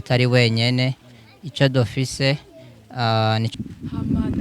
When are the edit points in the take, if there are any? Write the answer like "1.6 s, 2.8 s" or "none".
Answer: 3.5 s